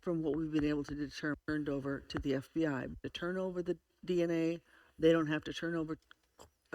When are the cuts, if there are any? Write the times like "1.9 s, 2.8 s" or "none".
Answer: 1.4 s, 2.9 s

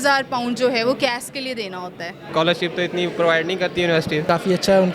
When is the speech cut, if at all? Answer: 2.3 s

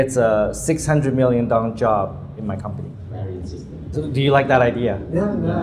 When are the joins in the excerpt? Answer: 3.9 s

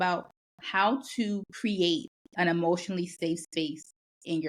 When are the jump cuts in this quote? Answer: none

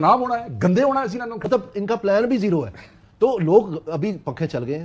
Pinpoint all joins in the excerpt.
1.3 s

